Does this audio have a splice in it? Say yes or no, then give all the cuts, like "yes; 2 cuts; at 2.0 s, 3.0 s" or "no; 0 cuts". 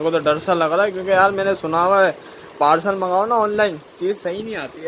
no; 0 cuts